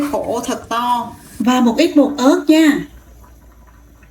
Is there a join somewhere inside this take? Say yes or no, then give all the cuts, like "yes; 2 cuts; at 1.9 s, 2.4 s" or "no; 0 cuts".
yes; 1 cut; at 1.2 s